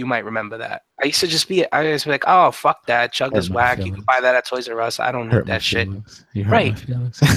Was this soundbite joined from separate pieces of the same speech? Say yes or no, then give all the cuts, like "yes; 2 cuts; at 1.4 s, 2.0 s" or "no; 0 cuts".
no; 0 cuts